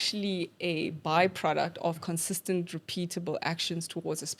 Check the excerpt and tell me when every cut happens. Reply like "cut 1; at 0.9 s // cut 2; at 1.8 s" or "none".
none